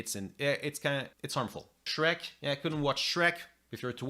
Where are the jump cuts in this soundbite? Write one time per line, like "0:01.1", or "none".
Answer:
0:01.2